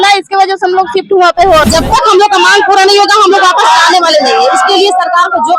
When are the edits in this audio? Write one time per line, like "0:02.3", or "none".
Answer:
0:01.6